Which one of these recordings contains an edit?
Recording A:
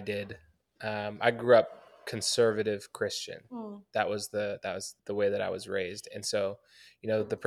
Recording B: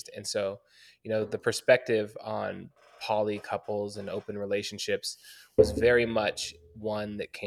A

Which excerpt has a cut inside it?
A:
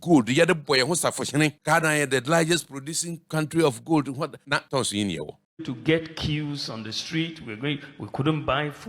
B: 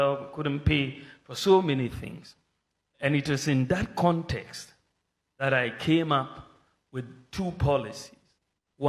A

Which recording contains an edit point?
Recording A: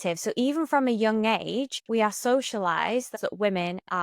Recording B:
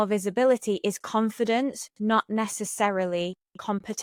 A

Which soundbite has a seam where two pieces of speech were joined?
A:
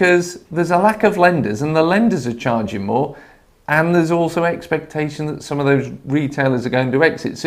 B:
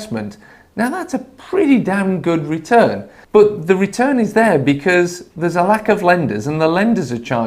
B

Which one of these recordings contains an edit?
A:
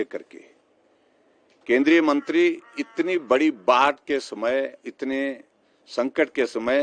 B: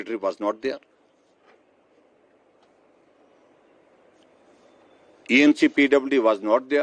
A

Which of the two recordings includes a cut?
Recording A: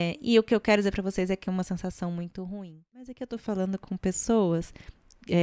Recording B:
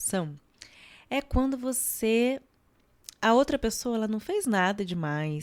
A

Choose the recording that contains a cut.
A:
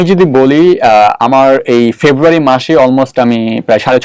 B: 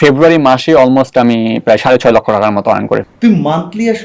B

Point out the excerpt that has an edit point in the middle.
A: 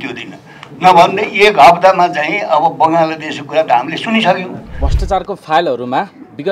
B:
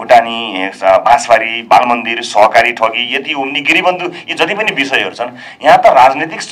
A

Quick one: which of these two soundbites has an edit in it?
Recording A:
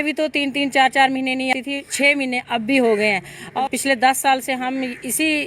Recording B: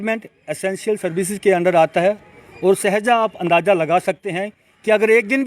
A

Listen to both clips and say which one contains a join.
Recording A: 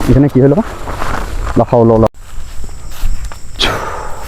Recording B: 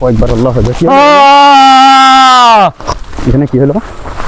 A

